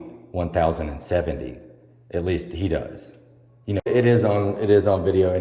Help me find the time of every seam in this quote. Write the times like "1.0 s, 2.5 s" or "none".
3.9 s